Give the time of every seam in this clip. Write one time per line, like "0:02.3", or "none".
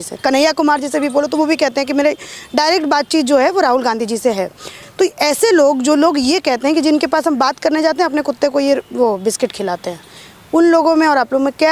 none